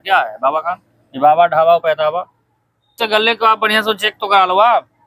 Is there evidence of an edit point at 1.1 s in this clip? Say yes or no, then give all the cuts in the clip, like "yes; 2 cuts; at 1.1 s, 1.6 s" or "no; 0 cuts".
no; 1 cut; at 3.0 s